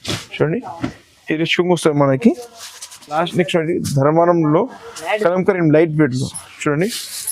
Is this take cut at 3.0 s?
yes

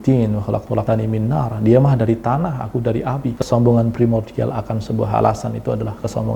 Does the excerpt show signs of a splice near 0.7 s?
yes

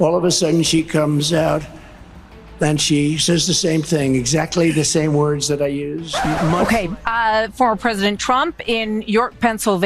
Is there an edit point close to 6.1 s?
yes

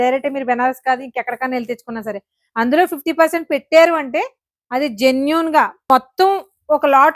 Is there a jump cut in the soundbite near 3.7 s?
no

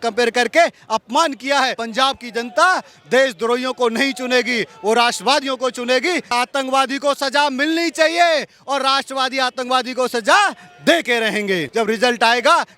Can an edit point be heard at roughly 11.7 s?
yes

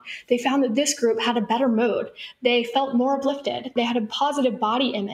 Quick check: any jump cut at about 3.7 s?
yes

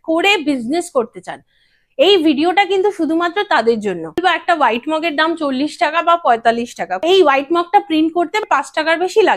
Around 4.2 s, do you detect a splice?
yes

